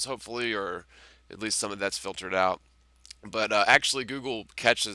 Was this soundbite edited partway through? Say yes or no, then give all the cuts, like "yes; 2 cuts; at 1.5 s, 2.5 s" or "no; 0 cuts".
no; 0 cuts